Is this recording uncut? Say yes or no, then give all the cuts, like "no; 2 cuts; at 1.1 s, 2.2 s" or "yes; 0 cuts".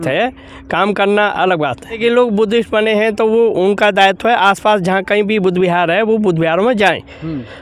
no; 1 cut; at 2.0 s